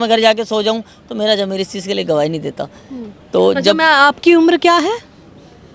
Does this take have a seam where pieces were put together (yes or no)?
no